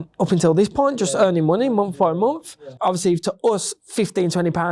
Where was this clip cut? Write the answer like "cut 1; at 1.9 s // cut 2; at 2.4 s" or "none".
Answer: cut 1; at 2.7 s